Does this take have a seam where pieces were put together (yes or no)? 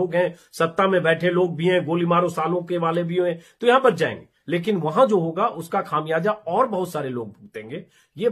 no